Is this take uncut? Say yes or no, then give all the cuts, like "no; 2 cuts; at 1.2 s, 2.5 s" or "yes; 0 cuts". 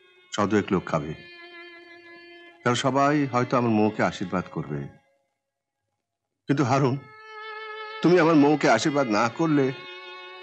yes; 0 cuts